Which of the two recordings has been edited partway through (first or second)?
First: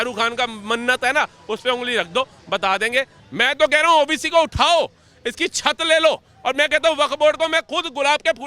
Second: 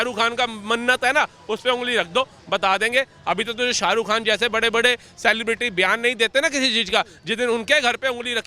first